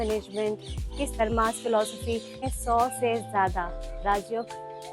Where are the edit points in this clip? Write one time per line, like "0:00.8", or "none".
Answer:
0:01.1
0:02.5